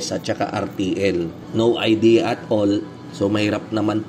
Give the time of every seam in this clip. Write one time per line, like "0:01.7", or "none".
0:01.4